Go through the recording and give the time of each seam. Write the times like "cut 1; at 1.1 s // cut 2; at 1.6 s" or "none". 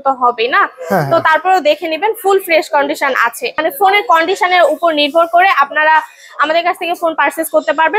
cut 1; at 3.7 s